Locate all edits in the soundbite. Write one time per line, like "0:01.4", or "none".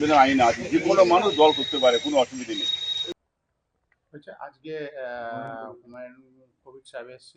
0:03.2